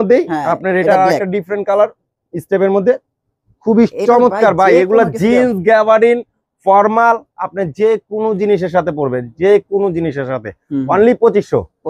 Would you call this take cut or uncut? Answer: uncut